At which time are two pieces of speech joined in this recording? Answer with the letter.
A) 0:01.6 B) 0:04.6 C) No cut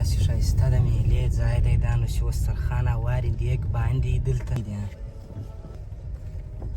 B